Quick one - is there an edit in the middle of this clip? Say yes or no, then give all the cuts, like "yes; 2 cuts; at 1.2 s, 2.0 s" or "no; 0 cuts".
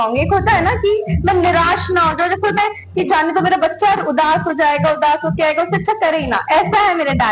no; 0 cuts